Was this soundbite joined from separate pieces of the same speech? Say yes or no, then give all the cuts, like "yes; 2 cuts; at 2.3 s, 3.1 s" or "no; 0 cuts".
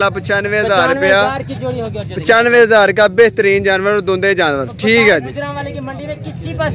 no; 0 cuts